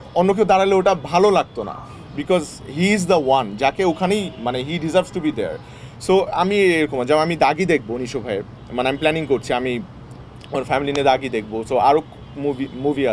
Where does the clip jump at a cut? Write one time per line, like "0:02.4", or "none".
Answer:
none